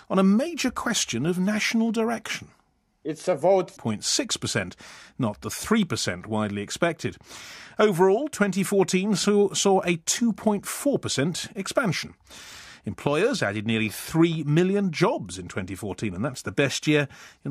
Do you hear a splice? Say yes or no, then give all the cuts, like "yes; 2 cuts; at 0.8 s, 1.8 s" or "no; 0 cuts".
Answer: no; 0 cuts